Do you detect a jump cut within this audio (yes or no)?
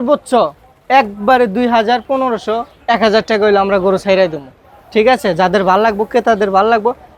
no